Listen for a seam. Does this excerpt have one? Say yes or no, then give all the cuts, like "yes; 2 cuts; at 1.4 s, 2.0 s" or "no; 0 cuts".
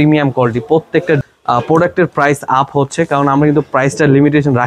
yes; 1 cut; at 1.2 s